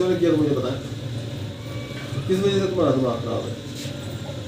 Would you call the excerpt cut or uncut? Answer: cut